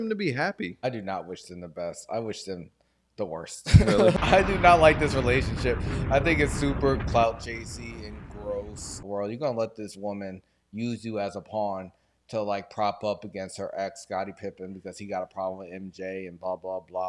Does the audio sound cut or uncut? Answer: cut